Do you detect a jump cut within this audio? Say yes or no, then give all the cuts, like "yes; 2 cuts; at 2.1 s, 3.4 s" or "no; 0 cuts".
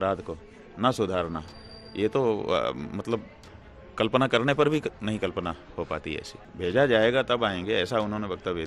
yes; 1 cut; at 6.4 s